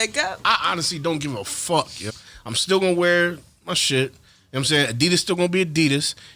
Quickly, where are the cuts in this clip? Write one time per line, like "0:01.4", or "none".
0:02.1